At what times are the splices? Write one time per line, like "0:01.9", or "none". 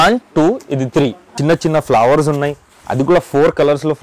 0:01.3